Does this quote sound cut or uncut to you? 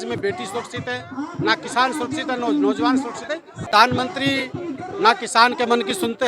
cut